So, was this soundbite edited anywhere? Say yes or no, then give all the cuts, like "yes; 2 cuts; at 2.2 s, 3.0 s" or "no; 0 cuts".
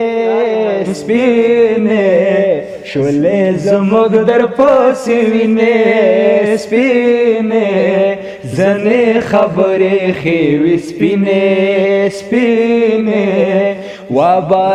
no; 0 cuts